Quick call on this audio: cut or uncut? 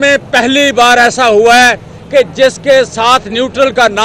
uncut